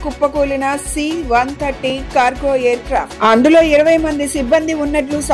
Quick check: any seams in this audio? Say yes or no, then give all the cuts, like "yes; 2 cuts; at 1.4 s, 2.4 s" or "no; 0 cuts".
no; 0 cuts